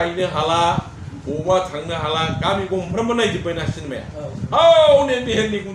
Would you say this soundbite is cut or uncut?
uncut